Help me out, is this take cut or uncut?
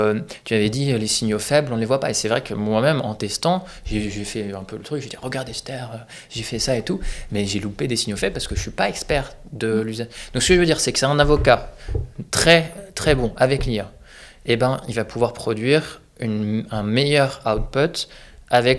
uncut